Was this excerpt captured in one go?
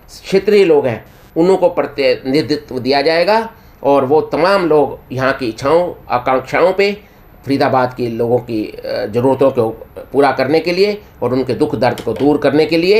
yes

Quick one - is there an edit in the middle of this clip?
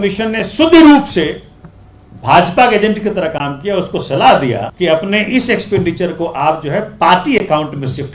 yes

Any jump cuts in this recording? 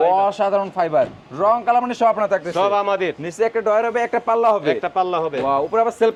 no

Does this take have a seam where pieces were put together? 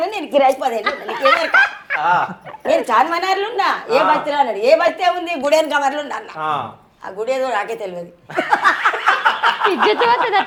no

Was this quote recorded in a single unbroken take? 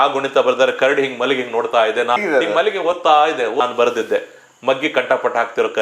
no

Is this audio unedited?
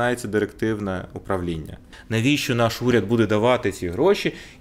no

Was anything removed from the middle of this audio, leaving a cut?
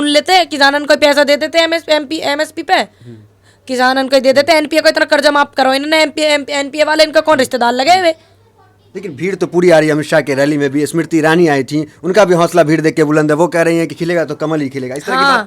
no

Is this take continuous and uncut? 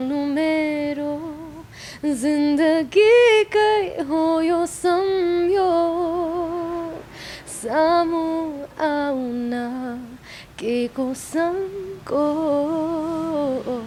yes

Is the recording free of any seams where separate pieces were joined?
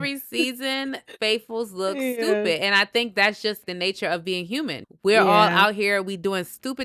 no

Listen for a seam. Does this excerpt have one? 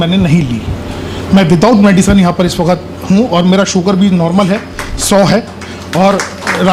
no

